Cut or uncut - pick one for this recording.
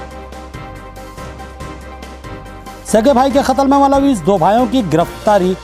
cut